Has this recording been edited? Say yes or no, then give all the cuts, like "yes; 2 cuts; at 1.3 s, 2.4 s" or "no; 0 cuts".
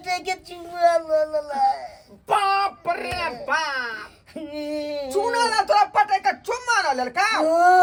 no; 0 cuts